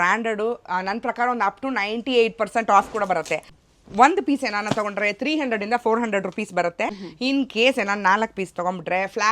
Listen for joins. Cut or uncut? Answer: cut